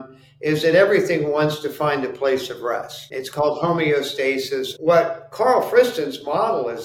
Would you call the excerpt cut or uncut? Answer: cut